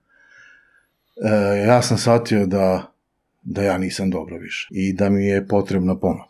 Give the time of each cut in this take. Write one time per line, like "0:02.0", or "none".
0:04.6